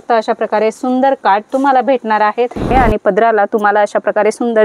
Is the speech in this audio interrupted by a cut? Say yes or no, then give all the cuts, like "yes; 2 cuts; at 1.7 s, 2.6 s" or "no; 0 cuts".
yes; 1 cut; at 2.7 s